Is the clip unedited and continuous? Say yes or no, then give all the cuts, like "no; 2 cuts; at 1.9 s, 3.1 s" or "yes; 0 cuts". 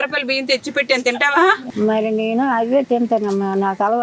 no; 1 cut; at 1.7 s